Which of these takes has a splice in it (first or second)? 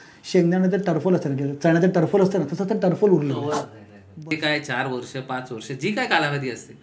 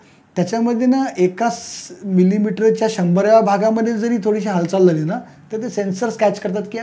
first